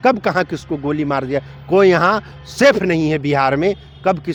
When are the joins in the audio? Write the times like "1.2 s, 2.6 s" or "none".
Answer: none